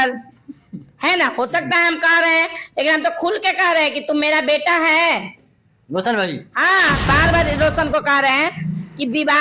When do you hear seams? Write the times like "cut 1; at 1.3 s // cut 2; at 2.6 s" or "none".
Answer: cut 1; at 7.1 s